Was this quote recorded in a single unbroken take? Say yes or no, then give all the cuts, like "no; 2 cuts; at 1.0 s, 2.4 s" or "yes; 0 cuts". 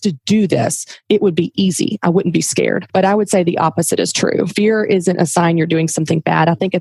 yes; 0 cuts